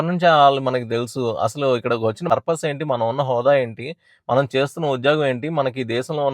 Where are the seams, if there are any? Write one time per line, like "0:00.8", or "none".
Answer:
0:02.2